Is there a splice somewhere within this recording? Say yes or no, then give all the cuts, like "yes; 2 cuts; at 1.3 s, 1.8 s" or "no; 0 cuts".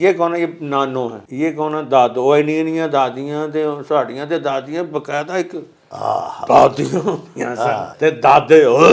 yes; 2 cuts; at 1.2 s, 7.9 s